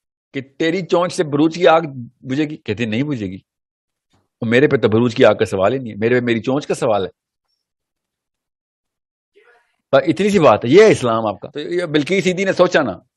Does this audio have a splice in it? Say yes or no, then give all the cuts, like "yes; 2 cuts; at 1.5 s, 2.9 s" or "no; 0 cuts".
yes; 1 cut; at 11.5 s